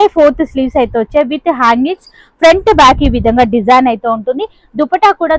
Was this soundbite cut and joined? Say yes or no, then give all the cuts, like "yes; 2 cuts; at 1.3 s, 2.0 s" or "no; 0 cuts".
no; 0 cuts